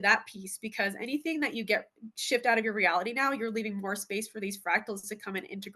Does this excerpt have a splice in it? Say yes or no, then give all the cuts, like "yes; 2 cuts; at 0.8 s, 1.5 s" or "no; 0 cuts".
no; 0 cuts